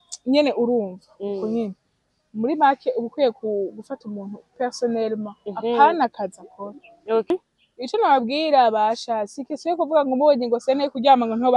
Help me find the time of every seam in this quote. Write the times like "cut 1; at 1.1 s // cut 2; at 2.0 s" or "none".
cut 1; at 7.3 s